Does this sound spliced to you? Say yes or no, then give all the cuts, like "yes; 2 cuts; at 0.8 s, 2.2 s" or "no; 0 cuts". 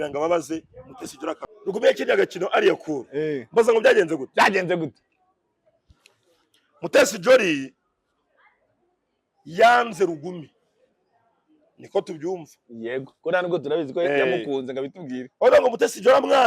yes; 1 cut; at 1.5 s